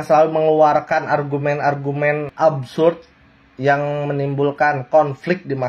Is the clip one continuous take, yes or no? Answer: yes